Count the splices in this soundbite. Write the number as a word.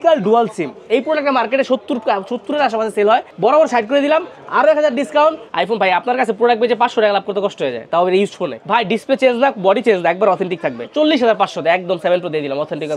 four